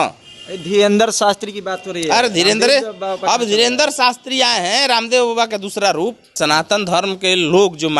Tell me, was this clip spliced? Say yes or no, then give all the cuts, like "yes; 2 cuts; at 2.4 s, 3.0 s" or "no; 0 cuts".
yes; 1 cut; at 6.3 s